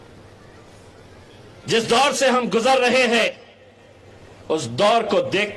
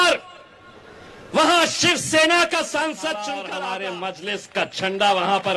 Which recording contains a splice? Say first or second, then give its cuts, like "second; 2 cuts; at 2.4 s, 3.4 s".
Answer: second; 1 cut; at 3.4 s